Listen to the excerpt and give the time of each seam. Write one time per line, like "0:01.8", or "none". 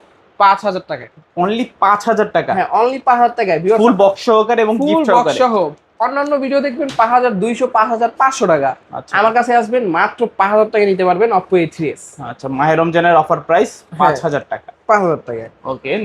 none